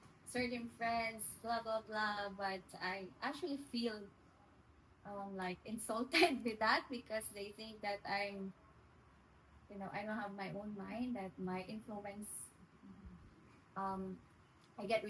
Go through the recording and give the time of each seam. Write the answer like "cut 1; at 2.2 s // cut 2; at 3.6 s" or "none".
none